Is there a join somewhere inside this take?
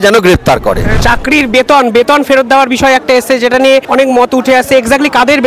yes; 2 cuts; at 1.0 s, 3.8 s

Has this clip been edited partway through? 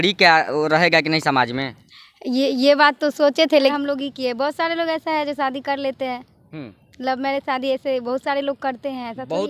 yes; 1 cut; at 3.7 s

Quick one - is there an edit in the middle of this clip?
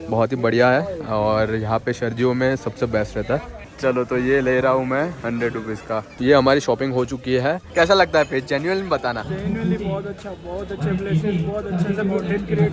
yes; 3 cuts; at 3.6 s, 6.1 s, 7.6 s

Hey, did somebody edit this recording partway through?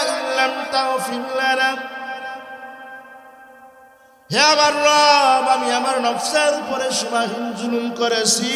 no; 0 cuts

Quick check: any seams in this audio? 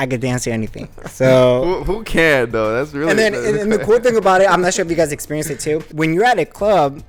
no; 0 cuts

